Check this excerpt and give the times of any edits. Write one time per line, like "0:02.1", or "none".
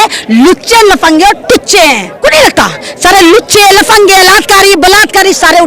0:02.2